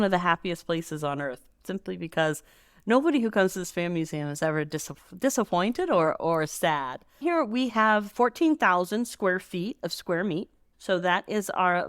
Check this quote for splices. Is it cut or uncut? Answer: cut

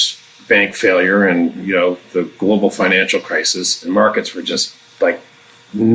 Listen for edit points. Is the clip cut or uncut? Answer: cut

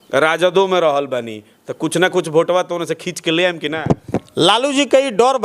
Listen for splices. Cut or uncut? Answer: cut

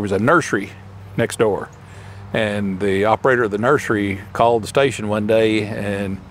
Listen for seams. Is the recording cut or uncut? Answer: uncut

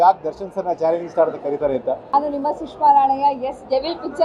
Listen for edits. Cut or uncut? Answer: cut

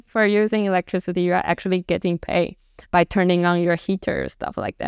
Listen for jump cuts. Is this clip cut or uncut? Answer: uncut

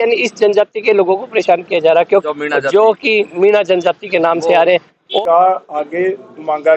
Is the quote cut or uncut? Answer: cut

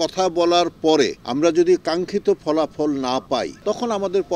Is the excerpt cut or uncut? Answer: cut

